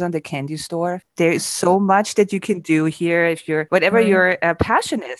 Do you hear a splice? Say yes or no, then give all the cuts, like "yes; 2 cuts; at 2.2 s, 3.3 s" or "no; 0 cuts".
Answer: yes; 1 cut; at 1.1 s